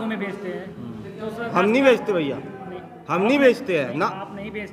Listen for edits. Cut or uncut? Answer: uncut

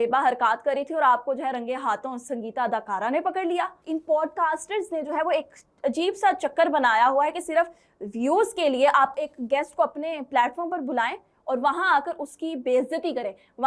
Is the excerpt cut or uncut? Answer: cut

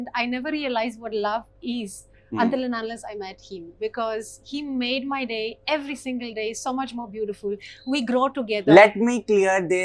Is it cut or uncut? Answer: uncut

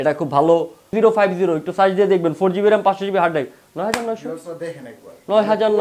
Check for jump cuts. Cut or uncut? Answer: cut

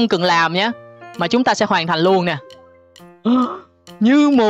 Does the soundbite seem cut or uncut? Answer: uncut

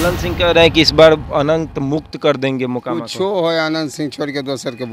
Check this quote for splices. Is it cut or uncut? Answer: uncut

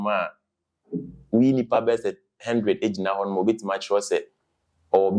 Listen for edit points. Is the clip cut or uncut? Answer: uncut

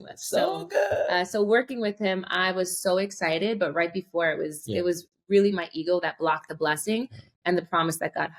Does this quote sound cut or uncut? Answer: uncut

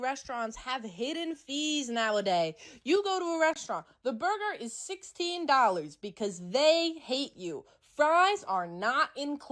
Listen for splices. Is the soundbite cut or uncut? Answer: uncut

